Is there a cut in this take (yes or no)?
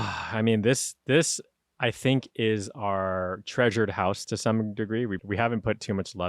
yes